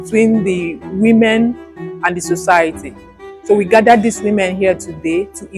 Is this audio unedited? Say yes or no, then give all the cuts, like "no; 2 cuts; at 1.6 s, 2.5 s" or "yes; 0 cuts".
yes; 0 cuts